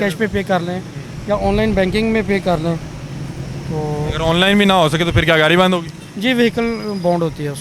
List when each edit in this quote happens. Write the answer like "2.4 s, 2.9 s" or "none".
none